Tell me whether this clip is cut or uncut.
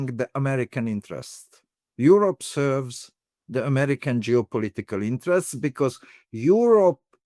uncut